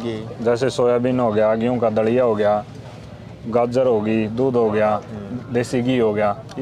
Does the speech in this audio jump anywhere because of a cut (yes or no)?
no